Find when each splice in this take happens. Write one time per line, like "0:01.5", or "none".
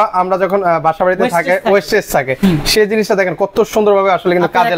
none